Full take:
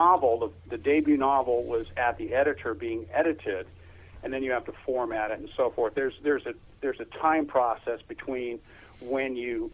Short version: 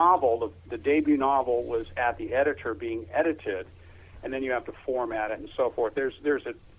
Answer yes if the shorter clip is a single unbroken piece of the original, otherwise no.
yes